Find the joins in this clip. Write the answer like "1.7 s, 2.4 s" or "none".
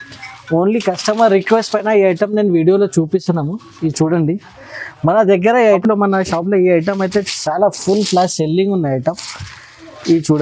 5.8 s